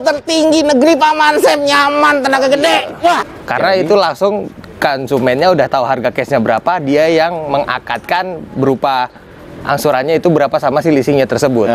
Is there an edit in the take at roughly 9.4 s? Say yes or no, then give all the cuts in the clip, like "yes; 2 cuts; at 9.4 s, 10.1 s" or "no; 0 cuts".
no; 1 cut; at 3.3 s